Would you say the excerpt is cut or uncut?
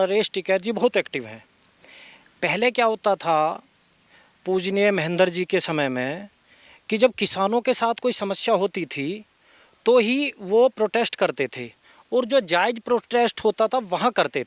uncut